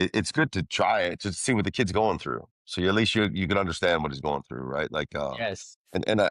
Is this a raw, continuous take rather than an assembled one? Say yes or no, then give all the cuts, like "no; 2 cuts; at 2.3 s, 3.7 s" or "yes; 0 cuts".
yes; 0 cuts